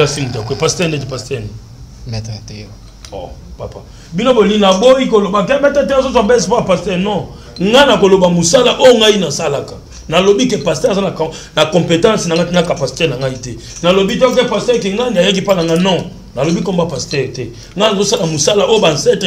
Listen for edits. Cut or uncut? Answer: uncut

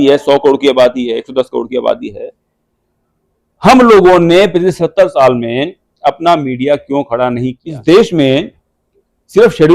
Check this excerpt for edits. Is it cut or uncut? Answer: cut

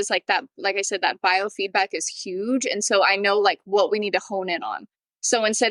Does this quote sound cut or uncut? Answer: uncut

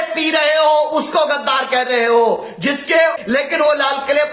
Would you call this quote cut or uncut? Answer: cut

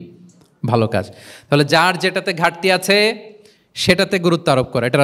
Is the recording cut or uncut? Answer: uncut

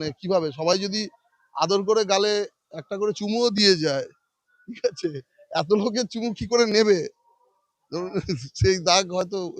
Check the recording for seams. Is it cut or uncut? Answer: uncut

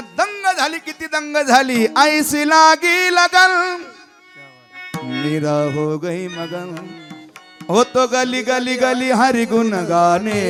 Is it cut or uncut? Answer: uncut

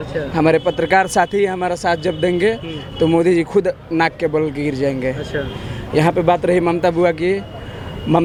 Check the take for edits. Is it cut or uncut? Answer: uncut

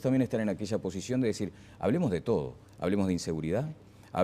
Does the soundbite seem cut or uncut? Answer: cut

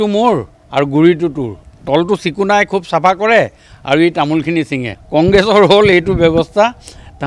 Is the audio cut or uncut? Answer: uncut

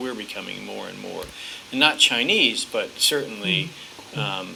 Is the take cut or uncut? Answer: uncut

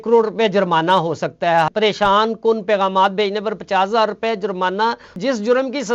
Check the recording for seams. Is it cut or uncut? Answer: cut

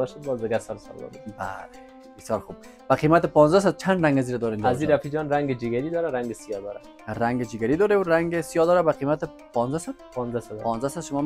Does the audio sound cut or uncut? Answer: uncut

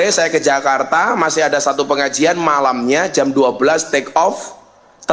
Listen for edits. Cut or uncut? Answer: uncut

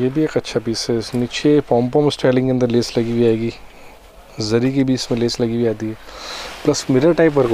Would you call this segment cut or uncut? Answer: uncut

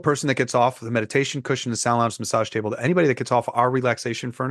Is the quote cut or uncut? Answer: uncut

